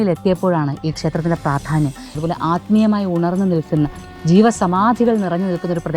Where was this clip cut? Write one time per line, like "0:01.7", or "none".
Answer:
0:02.2